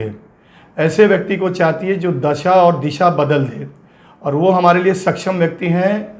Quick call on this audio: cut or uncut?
uncut